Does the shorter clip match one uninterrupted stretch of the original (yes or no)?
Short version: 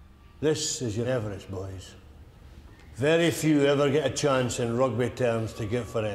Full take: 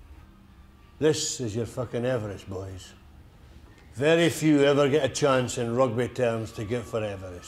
no